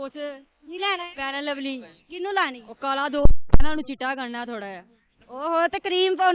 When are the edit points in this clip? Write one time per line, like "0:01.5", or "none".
none